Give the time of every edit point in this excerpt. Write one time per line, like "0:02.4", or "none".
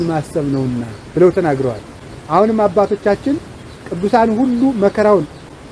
none